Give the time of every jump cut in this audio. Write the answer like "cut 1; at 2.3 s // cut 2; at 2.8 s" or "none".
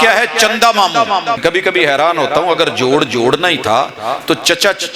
cut 1; at 1.4 s